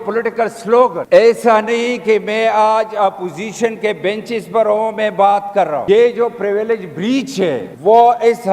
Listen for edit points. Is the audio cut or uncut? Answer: cut